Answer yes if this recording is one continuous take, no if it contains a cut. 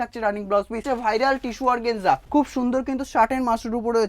no